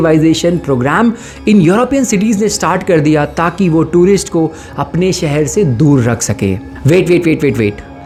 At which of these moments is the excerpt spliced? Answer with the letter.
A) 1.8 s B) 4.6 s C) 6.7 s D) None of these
D